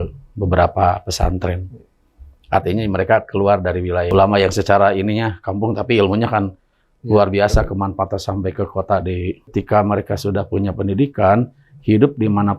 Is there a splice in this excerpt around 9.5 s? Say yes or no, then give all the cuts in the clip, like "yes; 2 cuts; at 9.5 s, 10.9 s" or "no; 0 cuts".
yes; 2 cuts; at 4.1 s, 9.5 s